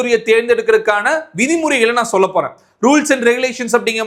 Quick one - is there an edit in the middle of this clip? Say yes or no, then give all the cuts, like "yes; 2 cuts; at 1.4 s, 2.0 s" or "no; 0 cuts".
no; 0 cuts